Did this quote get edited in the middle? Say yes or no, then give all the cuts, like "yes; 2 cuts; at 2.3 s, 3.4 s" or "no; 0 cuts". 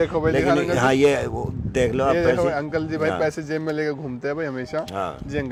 no; 0 cuts